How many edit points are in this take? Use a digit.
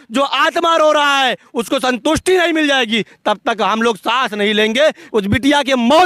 1